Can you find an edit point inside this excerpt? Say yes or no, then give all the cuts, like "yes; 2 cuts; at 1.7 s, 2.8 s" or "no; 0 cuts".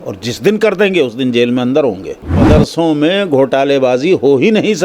yes; 1 cut; at 2.4 s